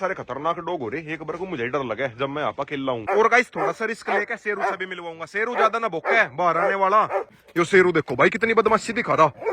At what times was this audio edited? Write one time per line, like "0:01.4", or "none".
0:03.0
0:07.4